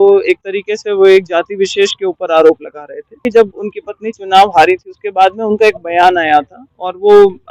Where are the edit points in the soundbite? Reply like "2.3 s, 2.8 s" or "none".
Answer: 3.2 s